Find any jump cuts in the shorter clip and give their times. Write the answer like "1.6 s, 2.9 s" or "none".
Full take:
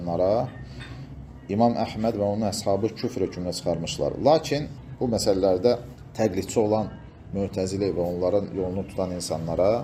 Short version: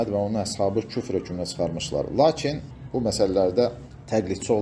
none